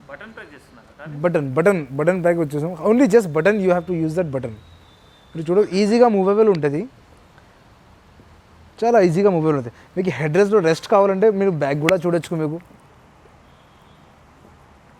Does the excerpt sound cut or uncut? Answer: uncut